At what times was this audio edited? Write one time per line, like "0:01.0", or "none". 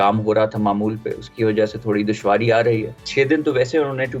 0:03.0